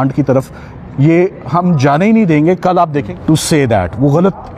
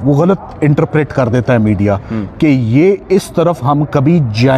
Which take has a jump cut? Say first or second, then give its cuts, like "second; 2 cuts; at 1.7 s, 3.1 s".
first; 1 cut; at 3.0 s